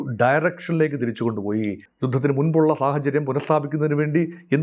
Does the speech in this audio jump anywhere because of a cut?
yes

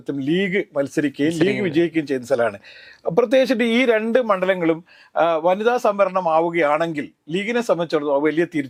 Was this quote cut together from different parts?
no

